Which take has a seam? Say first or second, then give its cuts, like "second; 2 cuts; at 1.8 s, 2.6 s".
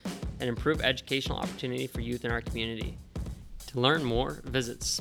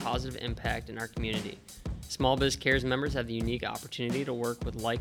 first; 1 cut; at 3.2 s